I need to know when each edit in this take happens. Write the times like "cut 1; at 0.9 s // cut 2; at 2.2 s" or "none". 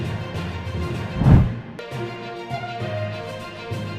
cut 1; at 1.1 s